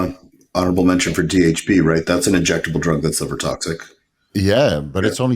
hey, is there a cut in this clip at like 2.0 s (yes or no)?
yes